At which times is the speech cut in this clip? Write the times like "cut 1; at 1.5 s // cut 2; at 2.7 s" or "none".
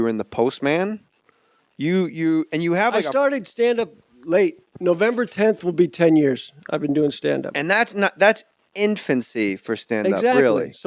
none